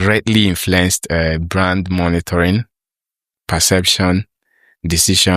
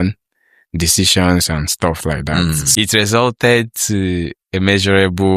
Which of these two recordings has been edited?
second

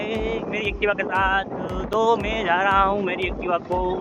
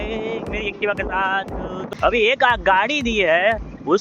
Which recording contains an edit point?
second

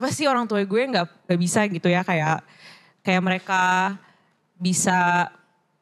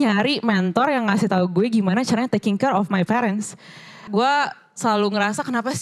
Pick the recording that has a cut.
second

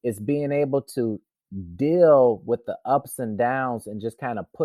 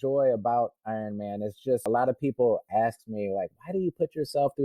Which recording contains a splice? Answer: second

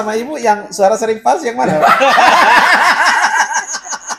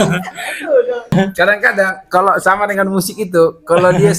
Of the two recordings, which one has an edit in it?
second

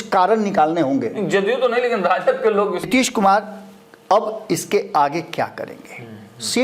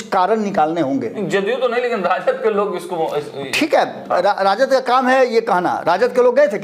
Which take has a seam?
first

